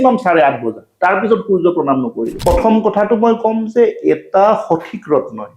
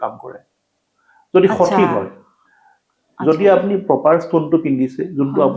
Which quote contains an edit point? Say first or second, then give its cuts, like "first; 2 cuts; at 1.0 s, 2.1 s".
first; 1 cut; at 2.3 s